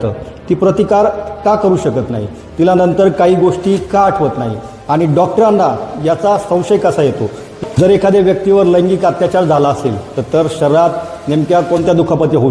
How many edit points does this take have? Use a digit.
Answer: 1